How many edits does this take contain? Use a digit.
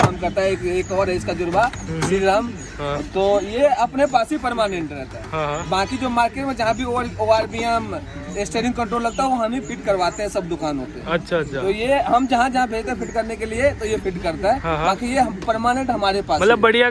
0